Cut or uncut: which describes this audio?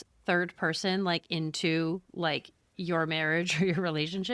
uncut